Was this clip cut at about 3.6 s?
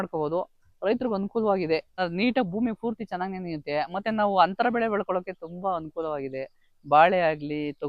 no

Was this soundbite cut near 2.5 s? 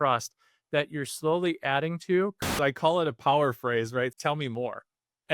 yes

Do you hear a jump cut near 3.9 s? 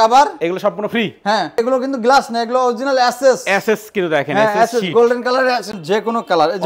no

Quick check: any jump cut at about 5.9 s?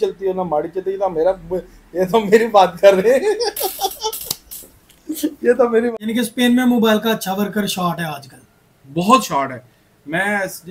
yes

